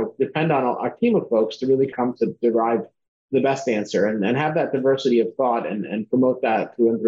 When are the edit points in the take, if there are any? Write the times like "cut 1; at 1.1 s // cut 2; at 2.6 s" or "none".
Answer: cut 1; at 1.9 s